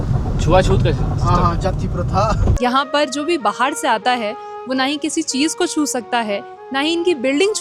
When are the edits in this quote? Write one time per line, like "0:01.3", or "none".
0:02.5